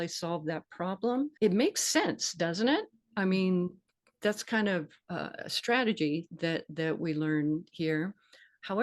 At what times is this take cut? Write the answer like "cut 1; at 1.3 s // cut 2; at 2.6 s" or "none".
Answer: cut 1; at 1.3 s // cut 2; at 5.0 s